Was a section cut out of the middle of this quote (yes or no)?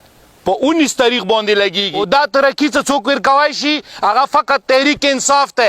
yes